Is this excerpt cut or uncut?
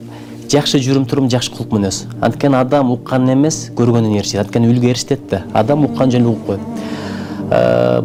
uncut